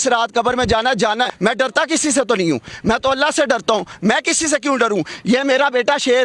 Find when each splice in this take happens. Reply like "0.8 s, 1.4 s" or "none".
1.3 s

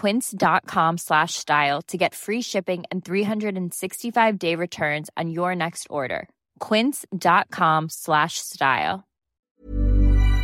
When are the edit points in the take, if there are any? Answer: 9.5 s

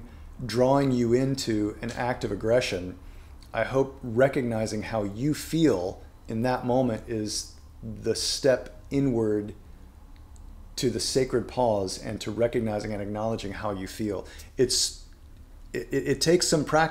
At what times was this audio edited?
none

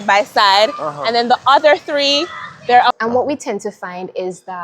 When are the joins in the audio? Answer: 3.0 s

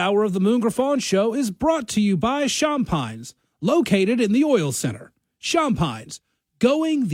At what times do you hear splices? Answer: none

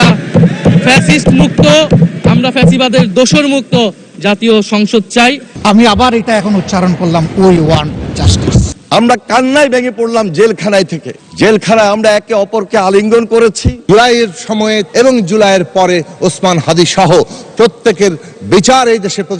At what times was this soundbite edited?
5.5 s, 8.8 s, 13.7 s, 14.9 s

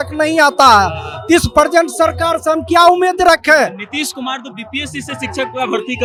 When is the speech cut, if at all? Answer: none

